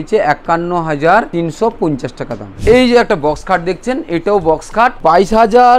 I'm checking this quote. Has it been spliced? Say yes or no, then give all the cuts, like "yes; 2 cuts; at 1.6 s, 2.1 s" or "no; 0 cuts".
yes; 3 cuts; at 1.3 s, 2.5 s, 5.0 s